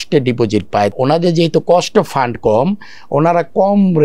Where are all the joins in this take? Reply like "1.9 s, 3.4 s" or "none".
0.9 s